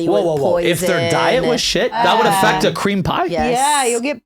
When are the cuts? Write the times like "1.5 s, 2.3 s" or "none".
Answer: 2.0 s

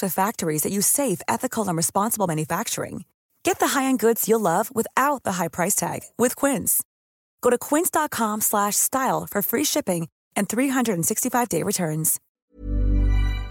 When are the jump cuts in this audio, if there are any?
12.2 s

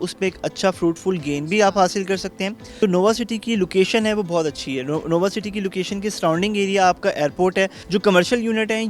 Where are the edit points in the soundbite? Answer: 2.7 s, 7.8 s

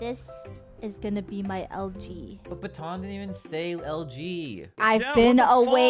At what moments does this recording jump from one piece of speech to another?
none

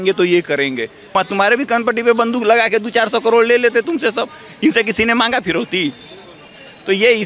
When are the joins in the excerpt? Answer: 1.1 s

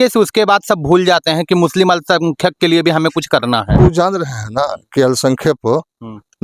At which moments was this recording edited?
3.8 s

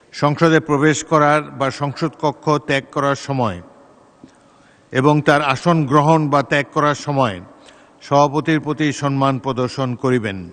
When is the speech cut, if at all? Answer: none

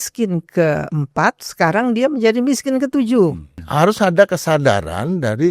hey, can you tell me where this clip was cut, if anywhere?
3.6 s

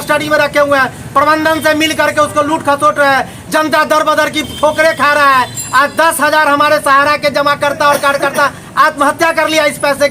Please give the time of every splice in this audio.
none

